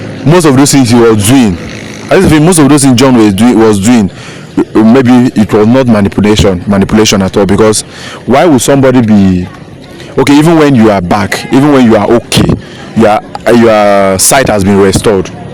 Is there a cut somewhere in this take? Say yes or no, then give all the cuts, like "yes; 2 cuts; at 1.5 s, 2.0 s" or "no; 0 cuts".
no; 0 cuts